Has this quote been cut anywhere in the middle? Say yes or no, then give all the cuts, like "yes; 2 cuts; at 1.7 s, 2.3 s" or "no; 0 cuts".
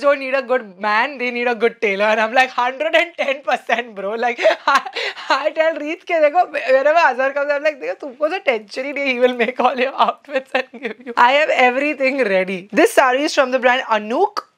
no; 0 cuts